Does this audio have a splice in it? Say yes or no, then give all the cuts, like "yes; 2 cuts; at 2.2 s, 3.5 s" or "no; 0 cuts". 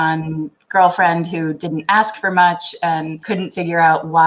yes; 1 cut; at 3.1 s